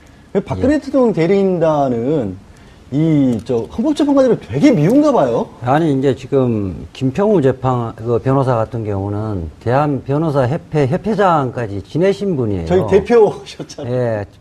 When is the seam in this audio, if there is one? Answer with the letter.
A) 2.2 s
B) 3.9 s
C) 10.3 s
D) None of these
B